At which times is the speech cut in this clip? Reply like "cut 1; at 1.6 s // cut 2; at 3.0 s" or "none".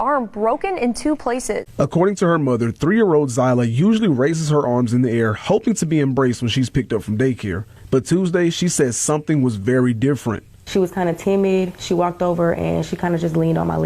cut 1; at 1.7 s